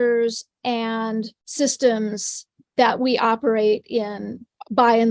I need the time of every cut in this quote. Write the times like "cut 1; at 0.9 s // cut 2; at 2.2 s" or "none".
cut 1; at 1.4 s